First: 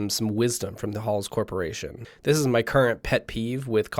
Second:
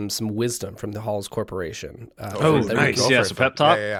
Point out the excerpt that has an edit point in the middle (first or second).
first